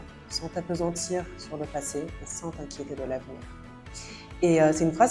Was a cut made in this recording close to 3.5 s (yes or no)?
no